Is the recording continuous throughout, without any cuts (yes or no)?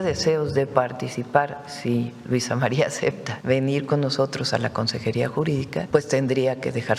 no